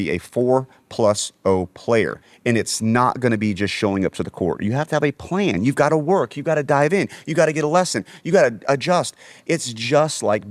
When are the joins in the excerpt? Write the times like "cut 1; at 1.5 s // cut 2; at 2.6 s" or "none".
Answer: none